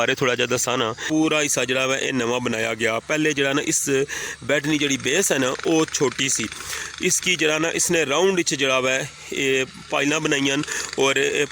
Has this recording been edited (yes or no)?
yes